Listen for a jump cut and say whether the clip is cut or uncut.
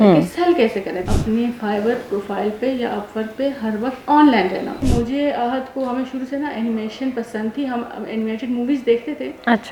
cut